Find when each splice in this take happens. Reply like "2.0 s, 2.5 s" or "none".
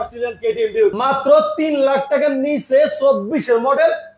1.0 s